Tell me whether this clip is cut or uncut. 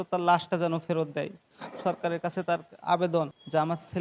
cut